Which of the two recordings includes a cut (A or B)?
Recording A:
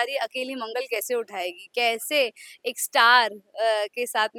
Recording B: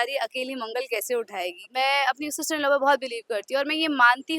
B